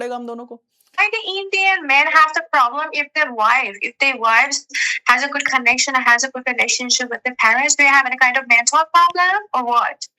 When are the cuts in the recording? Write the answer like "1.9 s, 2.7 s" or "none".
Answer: 1.0 s

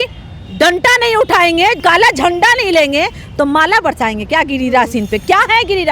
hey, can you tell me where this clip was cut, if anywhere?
1.8 s

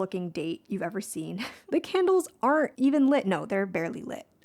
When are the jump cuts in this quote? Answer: 1.5 s, 2.7 s

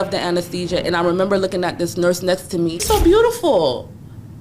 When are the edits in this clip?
2.8 s

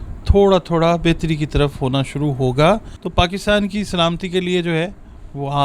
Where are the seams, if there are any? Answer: 3.0 s

